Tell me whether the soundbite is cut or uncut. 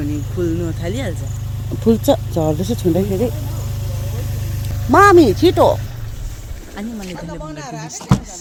uncut